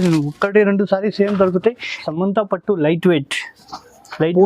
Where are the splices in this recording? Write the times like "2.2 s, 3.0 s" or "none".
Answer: 1.9 s